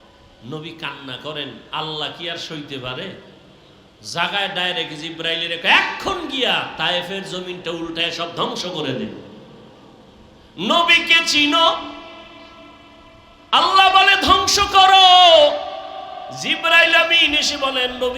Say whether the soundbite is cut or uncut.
uncut